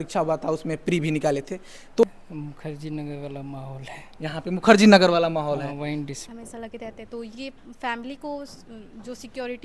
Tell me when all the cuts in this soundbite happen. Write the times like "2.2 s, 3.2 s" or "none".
2.0 s, 6.3 s